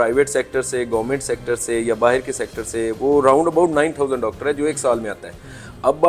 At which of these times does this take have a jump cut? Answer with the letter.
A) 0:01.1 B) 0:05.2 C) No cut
C